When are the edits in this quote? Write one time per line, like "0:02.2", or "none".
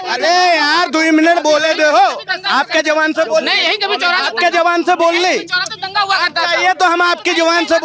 none